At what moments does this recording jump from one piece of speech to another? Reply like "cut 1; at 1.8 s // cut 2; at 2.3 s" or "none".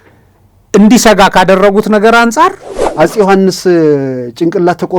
cut 1; at 2.8 s